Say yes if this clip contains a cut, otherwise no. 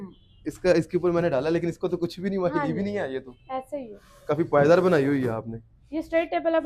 no